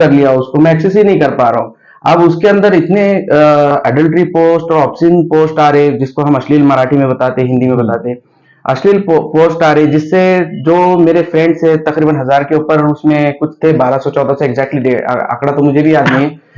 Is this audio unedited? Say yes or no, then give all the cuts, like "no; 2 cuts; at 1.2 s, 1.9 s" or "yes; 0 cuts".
yes; 0 cuts